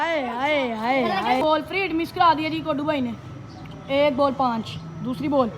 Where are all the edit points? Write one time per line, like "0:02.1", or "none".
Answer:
0:01.4